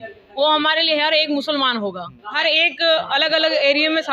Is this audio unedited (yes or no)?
no